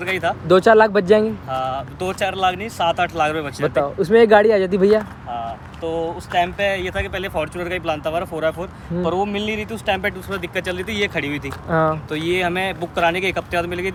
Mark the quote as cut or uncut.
uncut